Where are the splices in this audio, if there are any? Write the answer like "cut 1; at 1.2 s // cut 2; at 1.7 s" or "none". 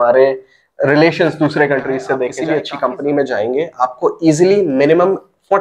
cut 1; at 2.4 s